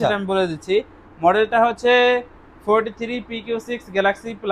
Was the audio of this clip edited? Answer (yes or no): no